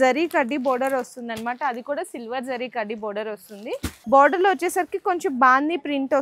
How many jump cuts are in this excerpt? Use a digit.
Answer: 1